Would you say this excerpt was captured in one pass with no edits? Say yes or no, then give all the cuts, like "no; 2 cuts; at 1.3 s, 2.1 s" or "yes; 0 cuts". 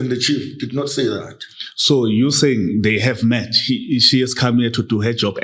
yes; 0 cuts